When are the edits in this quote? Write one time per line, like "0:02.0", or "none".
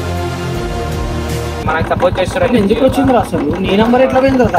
0:01.7